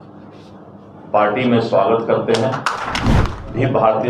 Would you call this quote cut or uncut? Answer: cut